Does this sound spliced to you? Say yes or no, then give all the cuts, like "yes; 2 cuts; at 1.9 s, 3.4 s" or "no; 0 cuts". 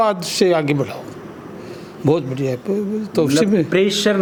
no; 0 cuts